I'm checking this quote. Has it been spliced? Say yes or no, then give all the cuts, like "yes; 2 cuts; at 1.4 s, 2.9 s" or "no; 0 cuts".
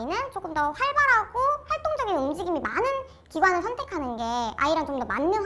no; 0 cuts